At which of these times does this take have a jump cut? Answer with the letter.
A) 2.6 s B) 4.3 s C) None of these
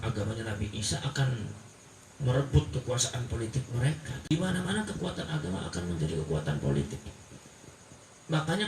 B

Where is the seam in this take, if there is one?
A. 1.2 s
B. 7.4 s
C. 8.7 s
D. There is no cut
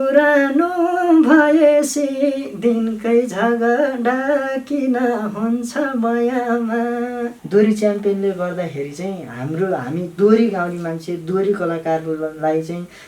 B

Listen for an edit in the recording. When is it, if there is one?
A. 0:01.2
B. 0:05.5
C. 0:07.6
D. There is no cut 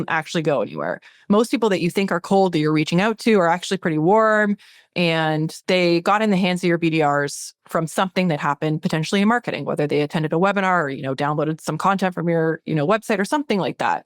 B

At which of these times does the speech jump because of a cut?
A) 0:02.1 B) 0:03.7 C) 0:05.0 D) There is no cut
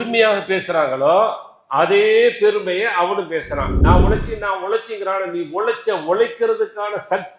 B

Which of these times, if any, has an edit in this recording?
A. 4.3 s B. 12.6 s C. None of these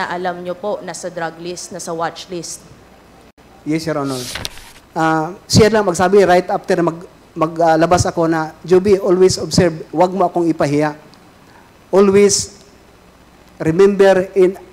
A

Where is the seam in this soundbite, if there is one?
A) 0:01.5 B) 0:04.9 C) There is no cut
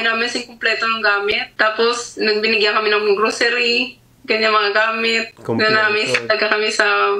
A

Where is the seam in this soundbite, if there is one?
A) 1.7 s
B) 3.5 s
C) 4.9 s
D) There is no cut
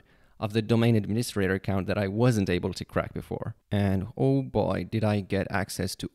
B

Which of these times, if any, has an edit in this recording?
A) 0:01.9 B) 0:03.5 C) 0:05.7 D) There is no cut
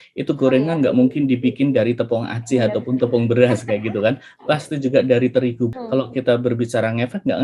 C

